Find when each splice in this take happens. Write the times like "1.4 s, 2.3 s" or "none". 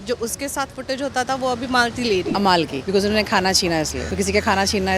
2.4 s, 4.0 s